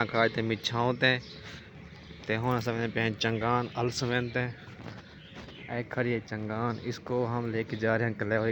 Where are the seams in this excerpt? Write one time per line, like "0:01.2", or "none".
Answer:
none